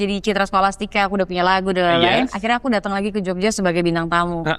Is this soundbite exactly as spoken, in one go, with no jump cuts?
yes; 0 cuts

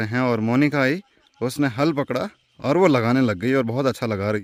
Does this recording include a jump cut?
no; 0 cuts

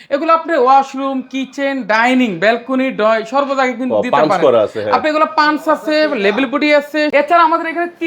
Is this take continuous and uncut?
no; 1 cut; at 7.1 s

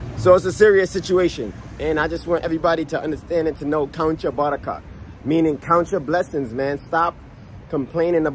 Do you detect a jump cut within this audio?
no; 0 cuts

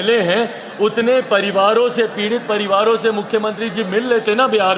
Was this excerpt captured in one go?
yes; 0 cuts

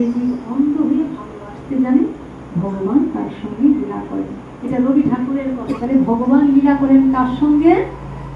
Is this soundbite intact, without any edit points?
no; 1 cut; at 5.8 s

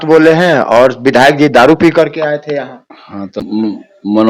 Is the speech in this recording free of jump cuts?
no; 1 cut; at 3.4 s

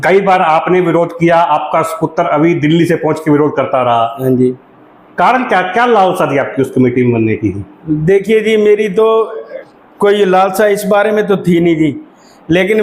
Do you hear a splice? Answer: no; 0 cuts

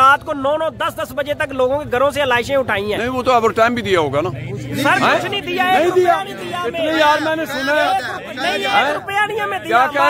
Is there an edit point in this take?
no; 0 cuts

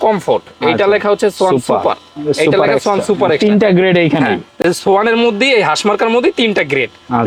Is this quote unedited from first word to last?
yes; 0 cuts

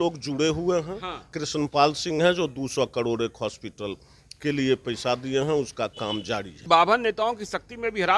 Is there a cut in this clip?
yes; 2 cuts; at 1.3 s, 6.5 s

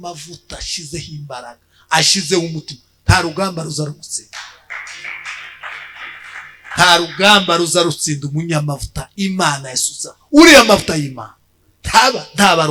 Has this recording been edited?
no; 0 cuts

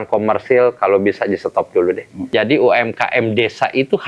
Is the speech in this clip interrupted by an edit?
yes; 1 cut; at 2.3 s

